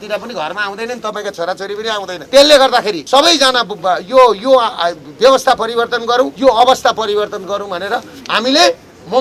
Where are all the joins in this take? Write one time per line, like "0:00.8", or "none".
0:02.2
0:03.0
0:06.3